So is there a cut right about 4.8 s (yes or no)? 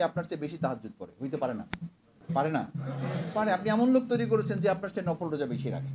no